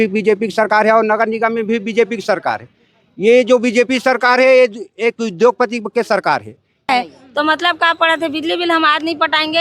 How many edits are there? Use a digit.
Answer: 1